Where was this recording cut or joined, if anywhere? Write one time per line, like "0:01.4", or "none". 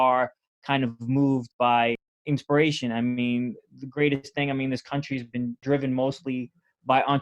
0:02.1
0:05.6